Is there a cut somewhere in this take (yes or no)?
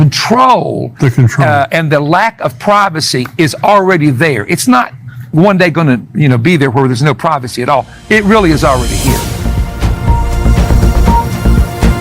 yes